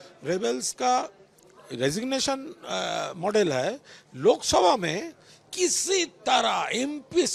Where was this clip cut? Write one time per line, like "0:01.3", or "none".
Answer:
none